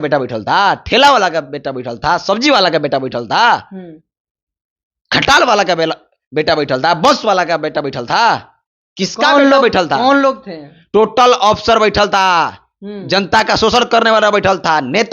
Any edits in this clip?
no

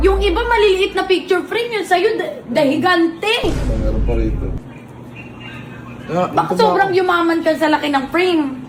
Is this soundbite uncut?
yes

